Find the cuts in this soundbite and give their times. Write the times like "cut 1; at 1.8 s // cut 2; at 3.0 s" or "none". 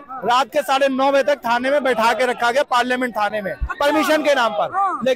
none